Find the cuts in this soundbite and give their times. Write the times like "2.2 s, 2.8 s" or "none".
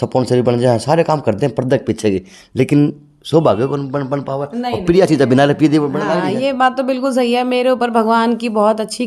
none